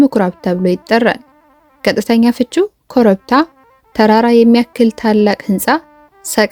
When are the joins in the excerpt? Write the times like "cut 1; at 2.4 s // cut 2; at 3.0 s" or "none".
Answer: none